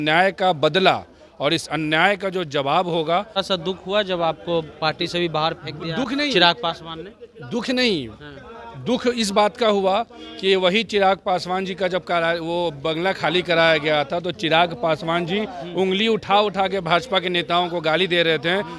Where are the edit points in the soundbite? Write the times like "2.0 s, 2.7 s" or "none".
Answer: 3.4 s